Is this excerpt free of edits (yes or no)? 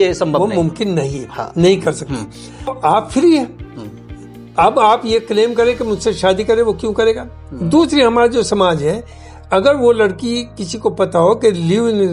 no